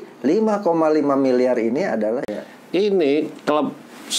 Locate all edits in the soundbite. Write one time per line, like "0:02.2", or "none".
0:02.3